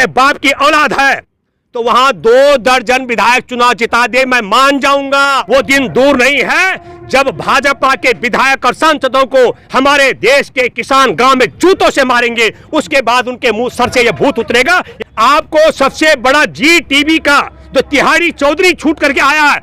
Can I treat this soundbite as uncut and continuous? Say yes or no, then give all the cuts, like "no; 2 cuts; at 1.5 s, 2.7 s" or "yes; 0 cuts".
no; 2 cuts; at 5.4 s, 14.9 s